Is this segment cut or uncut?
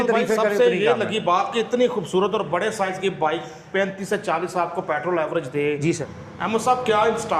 cut